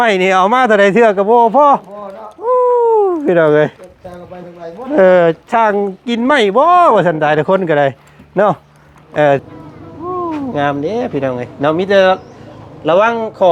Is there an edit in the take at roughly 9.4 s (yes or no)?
yes